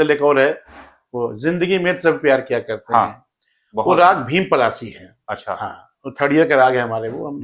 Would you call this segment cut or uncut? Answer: uncut